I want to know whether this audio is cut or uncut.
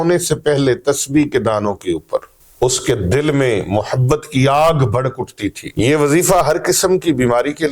cut